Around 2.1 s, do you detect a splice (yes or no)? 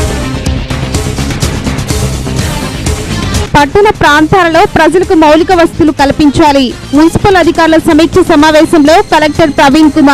yes